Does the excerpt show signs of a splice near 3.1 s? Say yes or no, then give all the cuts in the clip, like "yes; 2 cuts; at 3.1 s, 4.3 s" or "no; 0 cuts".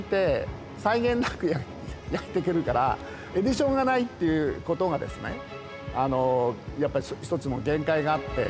yes; 1 cut; at 3.1 s